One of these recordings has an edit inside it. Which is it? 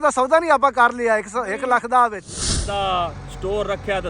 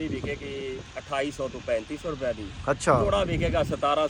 first; 1 cut; at 2.6 s

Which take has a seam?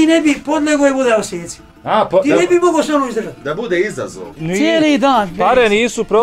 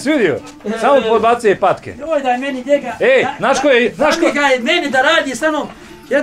first; 1 cut; at 4.4 s

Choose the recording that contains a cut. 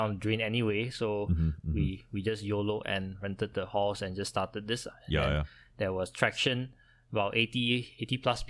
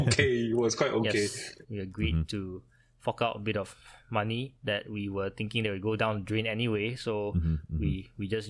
second; 1 cut; at 1.6 s

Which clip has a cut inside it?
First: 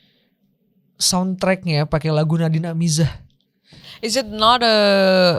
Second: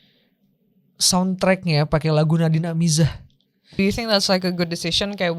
second; 1 cut; at 3.7 s

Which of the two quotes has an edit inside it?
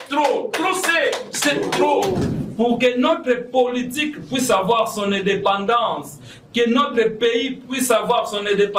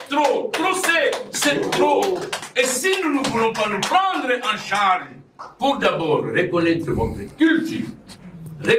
first; 1 cut; at 2.3 s

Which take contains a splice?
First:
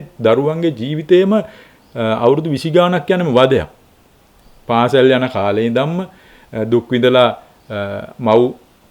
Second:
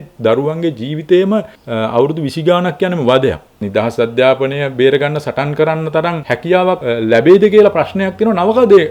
second; 3 cuts; at 1.6 s, 3.6 s, 6.5 s

